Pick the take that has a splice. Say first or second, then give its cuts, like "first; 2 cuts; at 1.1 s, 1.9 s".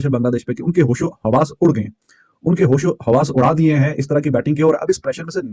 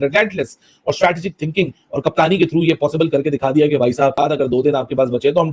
second; 1 cut; at 4.2 s